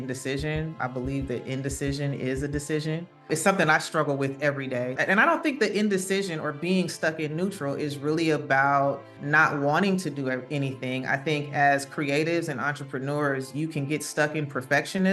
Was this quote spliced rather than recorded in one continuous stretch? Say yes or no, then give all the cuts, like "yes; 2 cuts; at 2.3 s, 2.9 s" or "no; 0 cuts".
yes; 4 cuts; at 0.8 s, 3.2 s, 5.0 s, 9.1 s